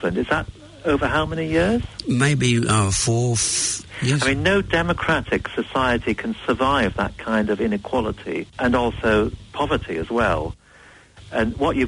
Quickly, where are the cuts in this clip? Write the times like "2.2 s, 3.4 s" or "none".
3.9 s, 8.6 s